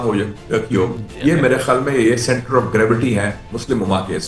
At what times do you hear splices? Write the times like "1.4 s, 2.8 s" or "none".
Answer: none